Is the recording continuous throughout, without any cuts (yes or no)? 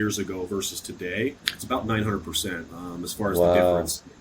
no